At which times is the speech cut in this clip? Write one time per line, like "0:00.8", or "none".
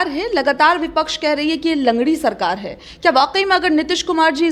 none